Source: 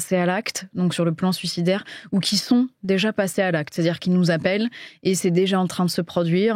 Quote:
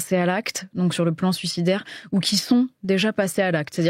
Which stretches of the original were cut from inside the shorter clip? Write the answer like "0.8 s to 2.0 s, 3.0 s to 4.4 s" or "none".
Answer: none

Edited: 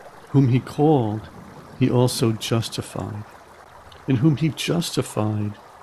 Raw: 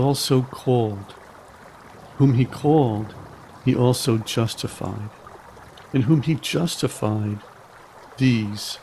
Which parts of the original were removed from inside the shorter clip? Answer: none

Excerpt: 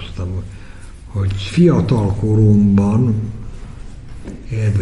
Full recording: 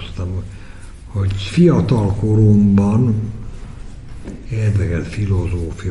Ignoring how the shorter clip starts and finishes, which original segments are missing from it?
none

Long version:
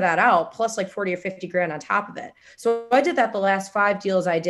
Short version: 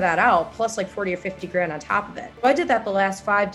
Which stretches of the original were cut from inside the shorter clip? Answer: 2.4 s to 2.8 s

